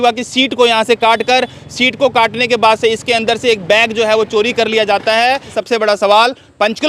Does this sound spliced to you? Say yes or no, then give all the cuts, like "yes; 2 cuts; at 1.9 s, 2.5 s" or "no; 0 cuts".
yes; 1 cut; at 5.5 s